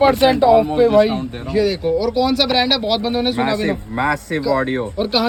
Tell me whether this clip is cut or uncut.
uncut